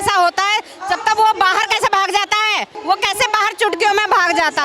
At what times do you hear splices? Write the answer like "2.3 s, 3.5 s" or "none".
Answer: 2.7 s